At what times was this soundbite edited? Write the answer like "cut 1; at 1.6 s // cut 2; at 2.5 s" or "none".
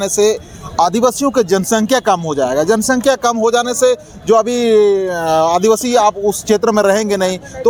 none